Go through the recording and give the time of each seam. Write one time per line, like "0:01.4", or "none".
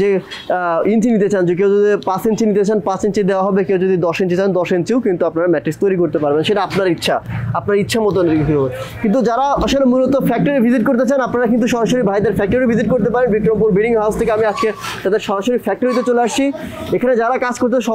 none

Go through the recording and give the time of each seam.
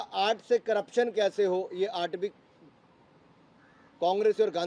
none

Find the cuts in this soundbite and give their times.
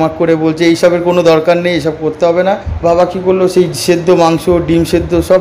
0:02.7

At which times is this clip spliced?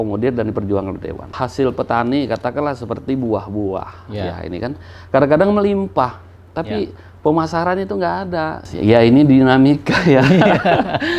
0:01.3
0:08.6

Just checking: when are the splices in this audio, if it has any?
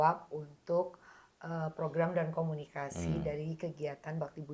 none

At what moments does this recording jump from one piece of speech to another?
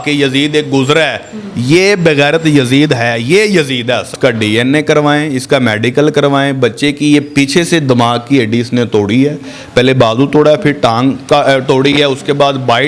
0:04.1

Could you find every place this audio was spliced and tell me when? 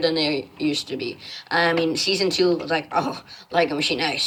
none

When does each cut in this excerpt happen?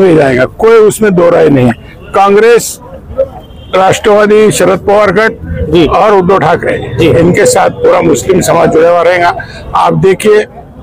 none

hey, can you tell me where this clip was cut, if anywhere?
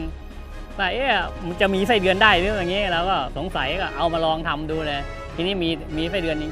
0:01.3

